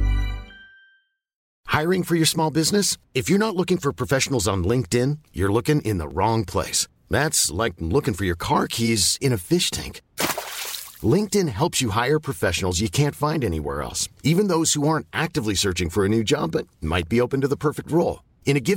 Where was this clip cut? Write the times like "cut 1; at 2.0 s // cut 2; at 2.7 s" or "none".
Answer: cut 1; at 1.5 s